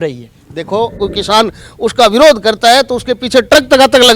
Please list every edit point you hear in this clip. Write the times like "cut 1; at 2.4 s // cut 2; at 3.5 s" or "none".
cut 1; at 1.0 s